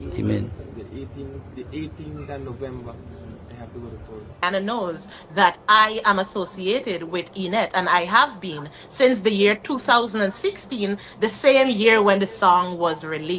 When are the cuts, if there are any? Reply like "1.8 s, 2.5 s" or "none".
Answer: 4.4 s